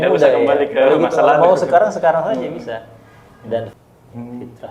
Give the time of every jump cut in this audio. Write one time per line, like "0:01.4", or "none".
0:03.7